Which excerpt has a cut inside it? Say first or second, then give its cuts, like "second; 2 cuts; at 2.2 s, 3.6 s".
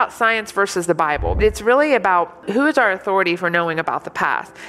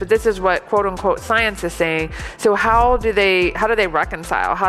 first; 2 cuts; at 1.4 s, 2.4 s